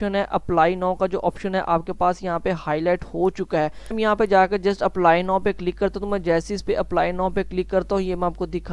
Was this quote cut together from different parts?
yes; 1 cut; at 4.0 s

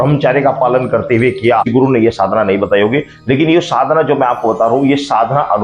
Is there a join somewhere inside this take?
yes; 1 cut; at 1.7 s

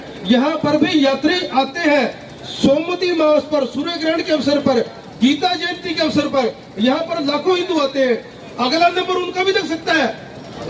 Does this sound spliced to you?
no; 0 cuts

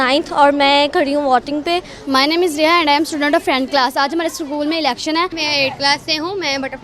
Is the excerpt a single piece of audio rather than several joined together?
no; 2 cuts; at 1.9 s, 5.4 s

